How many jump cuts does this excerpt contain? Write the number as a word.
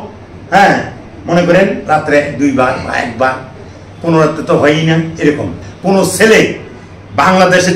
one